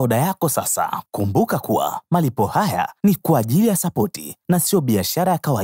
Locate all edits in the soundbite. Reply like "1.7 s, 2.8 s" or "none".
1.0 s